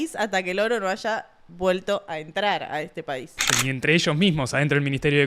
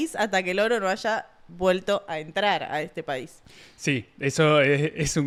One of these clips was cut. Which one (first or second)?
first